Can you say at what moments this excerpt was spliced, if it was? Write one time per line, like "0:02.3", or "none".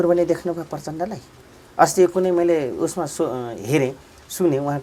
none